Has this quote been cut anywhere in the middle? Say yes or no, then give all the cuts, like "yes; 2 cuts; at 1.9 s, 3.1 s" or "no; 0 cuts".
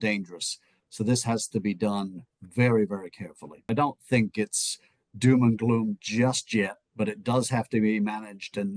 yes; 1 cut; at 3.7 s